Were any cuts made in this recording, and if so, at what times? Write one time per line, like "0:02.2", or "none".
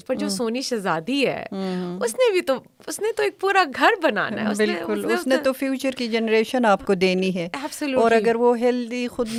none